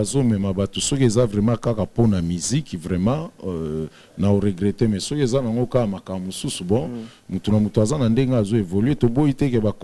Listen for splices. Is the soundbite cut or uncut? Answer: uncut